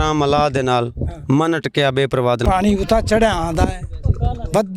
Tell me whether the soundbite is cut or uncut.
cut